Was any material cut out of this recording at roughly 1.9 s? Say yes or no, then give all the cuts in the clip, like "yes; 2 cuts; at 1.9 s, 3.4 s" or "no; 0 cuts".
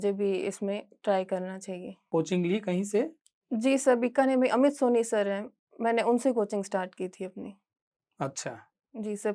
yes; 1 cut; at 1.9 s